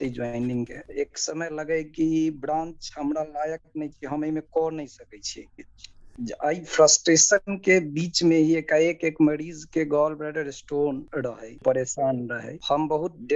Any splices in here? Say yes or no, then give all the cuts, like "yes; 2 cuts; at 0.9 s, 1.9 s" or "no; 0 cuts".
yes; 2 cuts; at 6.0 s, 11.6 s